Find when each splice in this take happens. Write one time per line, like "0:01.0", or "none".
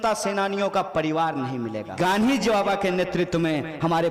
0:01.9